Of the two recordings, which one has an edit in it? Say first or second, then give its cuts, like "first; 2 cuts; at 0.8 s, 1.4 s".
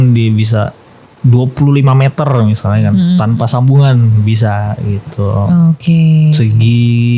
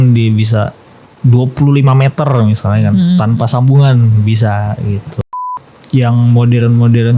second; 1 cut; at 5.2 s